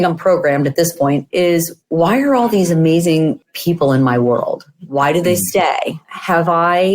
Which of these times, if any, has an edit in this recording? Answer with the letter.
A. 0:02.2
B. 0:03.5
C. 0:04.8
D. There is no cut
B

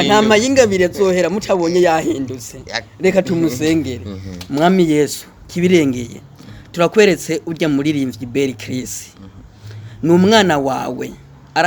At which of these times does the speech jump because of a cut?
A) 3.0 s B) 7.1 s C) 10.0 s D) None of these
D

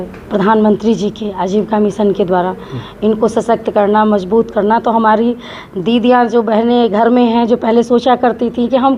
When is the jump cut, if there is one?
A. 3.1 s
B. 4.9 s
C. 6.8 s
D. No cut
D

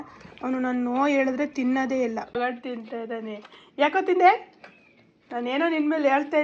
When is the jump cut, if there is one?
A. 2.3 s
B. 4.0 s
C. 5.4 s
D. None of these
A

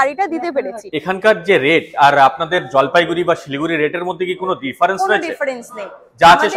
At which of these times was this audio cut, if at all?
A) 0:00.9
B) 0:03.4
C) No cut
A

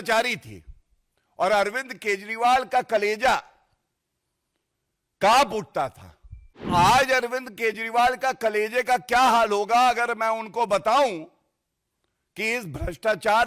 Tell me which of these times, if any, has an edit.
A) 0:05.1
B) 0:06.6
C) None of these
B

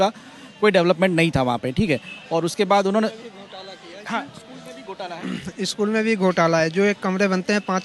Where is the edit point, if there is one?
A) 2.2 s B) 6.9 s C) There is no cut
C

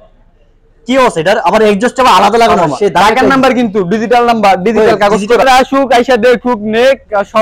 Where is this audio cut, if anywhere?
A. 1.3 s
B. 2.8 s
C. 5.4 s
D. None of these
C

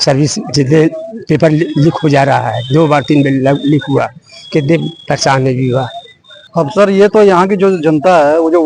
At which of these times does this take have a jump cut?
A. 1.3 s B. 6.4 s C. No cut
B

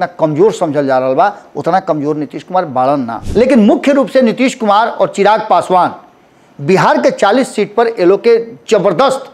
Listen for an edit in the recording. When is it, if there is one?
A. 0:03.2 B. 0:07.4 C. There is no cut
A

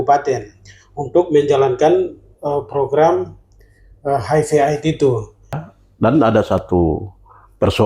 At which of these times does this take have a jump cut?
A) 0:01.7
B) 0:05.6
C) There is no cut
B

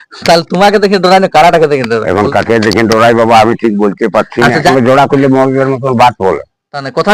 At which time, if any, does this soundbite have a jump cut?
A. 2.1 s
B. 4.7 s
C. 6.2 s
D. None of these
B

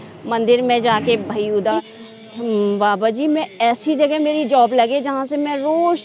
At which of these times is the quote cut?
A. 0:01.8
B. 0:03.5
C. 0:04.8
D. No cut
A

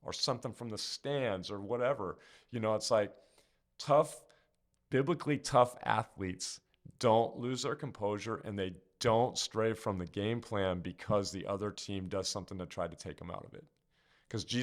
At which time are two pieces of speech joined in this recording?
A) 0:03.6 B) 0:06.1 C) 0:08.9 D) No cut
D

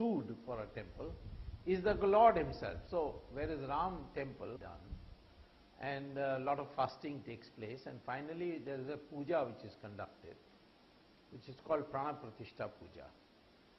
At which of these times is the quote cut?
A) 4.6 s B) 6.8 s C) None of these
C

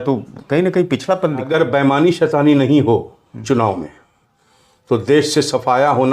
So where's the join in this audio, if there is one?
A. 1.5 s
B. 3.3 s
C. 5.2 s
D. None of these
A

